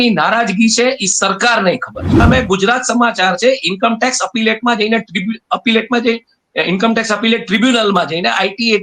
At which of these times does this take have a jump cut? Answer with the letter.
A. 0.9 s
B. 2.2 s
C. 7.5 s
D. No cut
B